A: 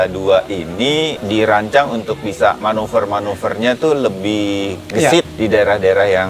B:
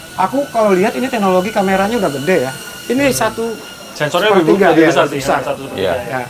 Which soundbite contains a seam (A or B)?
A